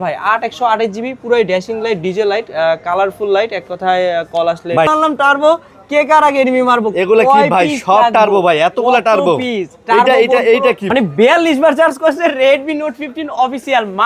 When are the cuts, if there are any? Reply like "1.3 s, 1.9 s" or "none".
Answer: 4.9 s, 10.9 s